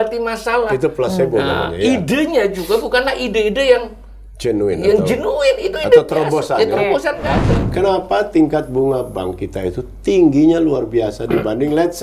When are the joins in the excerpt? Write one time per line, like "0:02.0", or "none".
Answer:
0:07.6